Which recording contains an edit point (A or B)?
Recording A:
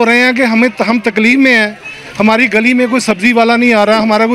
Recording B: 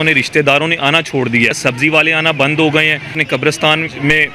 B